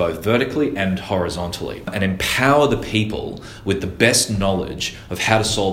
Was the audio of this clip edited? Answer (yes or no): yes